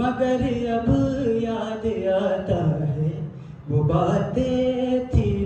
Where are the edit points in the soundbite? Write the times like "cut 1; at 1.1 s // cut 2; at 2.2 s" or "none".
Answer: none